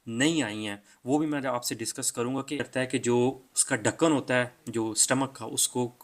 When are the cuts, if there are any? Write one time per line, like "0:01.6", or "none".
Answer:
0:02.7